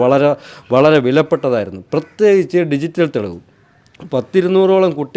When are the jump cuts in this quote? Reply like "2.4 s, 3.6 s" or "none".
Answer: none